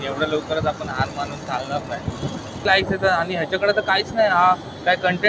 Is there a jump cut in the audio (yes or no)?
yes